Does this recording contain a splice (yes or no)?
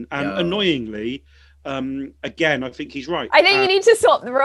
yes